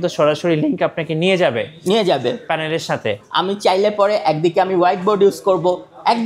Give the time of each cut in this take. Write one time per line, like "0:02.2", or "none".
0:03.3

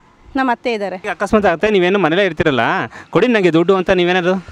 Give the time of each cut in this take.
0:01.0

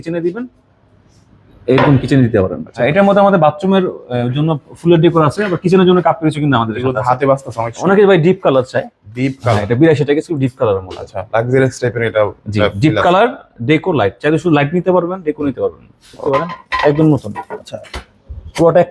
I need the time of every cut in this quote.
0:02.8
0:07.8
0:16.2

